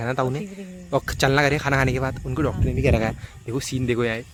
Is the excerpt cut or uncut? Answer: uncut